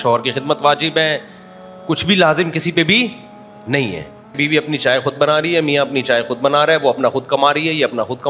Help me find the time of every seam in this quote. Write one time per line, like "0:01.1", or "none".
0:04.3